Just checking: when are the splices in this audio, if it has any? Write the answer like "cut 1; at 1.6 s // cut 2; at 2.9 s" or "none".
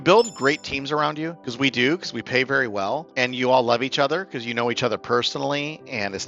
cut 1; at 1.4 s // cut 2; at 3.1 s